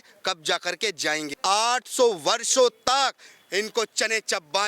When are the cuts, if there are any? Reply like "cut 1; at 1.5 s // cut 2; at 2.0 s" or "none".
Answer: cut 1; at 1.3 s